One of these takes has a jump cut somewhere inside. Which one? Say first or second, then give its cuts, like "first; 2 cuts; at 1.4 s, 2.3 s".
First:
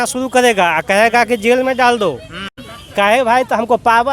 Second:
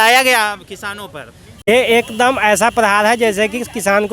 second; 1 cut; at 1.7 s